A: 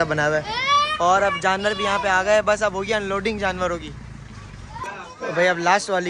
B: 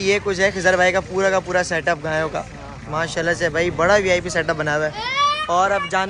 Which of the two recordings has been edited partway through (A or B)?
A